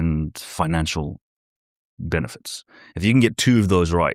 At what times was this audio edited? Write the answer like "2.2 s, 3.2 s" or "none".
none